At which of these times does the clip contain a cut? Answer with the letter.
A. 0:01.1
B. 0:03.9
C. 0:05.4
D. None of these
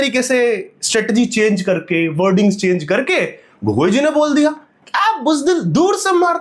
D